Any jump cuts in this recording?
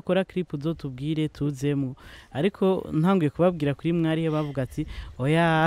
no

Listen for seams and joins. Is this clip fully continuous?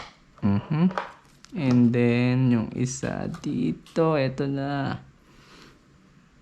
yes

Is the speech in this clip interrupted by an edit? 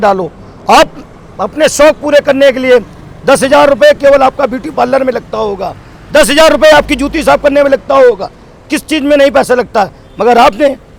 no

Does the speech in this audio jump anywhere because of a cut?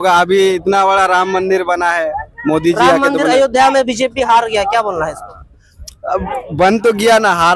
no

